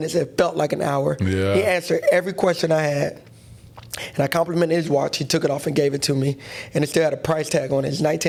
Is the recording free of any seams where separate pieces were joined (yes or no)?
yes